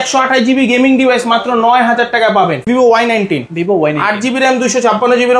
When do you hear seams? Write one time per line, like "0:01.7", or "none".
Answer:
0:02.7

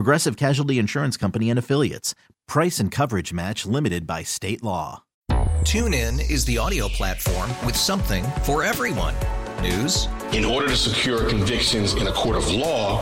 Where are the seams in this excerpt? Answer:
0:05.0

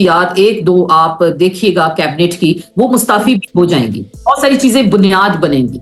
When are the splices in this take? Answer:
0:04.2

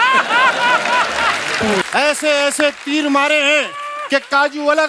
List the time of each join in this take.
0:01.8

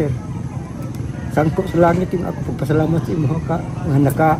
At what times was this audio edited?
none

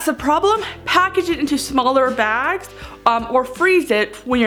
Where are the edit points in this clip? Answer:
none

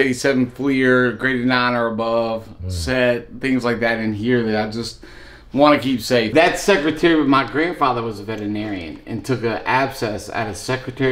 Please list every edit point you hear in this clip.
0:06.3

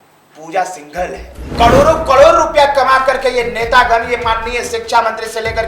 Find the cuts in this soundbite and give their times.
0:01.4

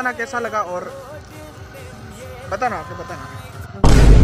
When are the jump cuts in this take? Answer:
none

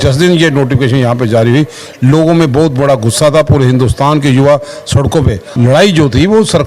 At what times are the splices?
0:05.4

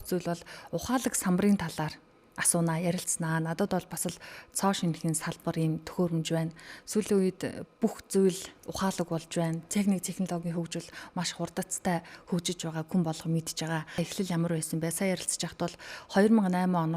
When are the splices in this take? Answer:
0:14.1

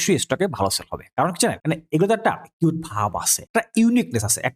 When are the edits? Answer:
0:01.6
0:03.3

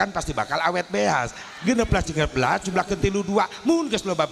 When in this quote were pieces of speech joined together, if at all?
0:01.4

